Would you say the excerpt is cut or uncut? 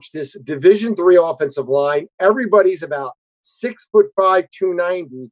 uncut